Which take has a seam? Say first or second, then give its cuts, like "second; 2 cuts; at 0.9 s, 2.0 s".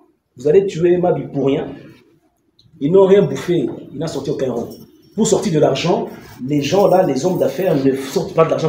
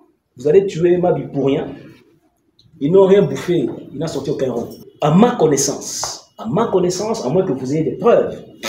second; 1 cut; at 4.8 s